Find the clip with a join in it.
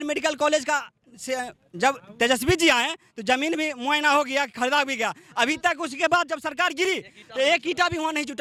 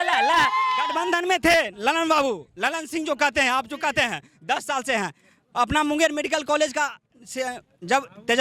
second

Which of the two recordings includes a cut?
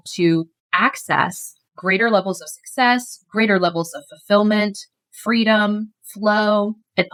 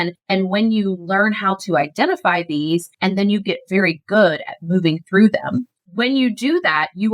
second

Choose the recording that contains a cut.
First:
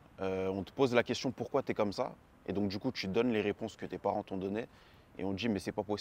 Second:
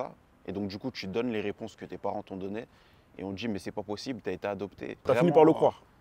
second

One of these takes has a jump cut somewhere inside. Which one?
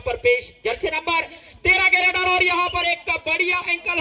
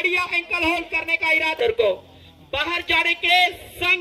second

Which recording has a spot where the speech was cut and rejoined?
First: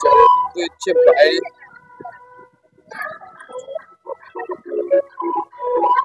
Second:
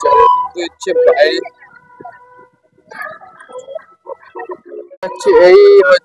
second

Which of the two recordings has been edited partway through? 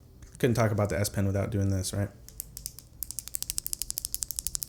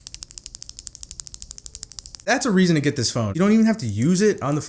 second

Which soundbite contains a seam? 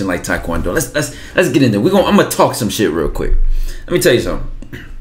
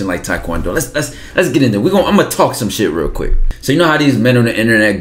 second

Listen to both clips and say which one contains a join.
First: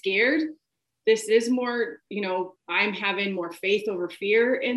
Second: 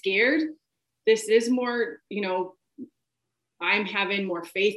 first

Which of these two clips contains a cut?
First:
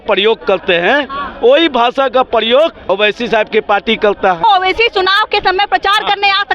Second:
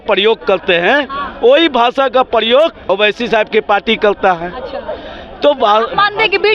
first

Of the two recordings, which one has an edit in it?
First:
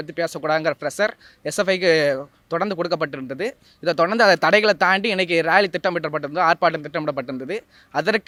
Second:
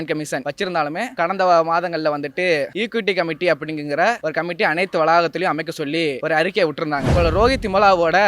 second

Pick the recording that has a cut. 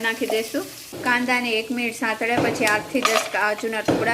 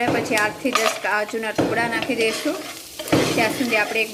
first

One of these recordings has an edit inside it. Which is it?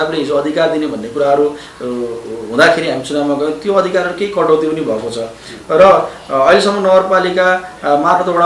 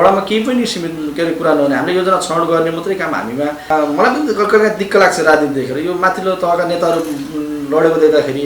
second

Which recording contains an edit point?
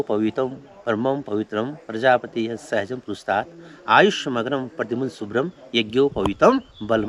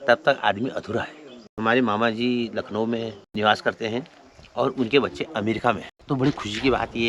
second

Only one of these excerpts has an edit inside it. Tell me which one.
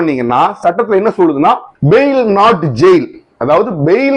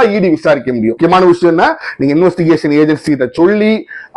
second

